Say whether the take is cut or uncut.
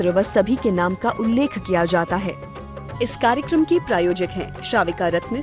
cut